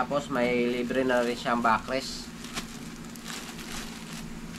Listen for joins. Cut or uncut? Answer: uncut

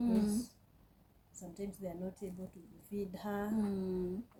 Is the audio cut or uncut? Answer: uncut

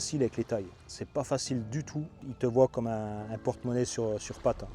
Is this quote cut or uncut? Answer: cut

